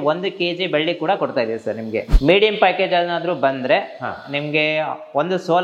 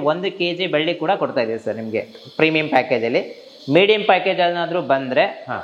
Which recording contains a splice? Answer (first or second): first